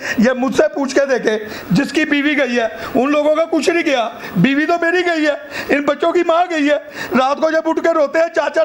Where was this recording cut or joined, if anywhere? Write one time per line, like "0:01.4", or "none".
none